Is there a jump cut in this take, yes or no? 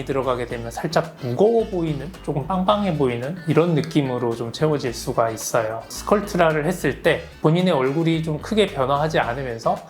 no